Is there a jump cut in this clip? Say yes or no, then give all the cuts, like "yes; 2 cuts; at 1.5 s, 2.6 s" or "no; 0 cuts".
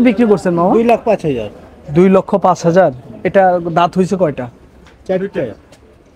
no; 0 cuts